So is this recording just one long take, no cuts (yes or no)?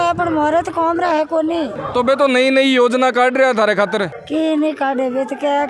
yes